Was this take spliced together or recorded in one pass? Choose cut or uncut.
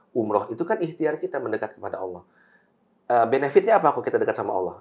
uncut